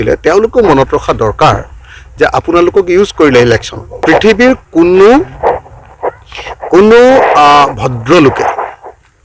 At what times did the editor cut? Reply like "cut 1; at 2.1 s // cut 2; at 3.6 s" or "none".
cut 1; at 4.0 s